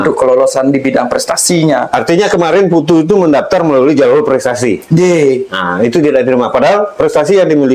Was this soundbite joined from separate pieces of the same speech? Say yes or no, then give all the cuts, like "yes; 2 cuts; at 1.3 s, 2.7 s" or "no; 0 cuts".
no; 0 cuts